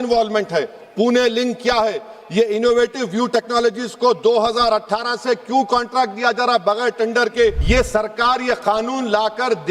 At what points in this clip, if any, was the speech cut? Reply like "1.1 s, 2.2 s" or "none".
7.6 s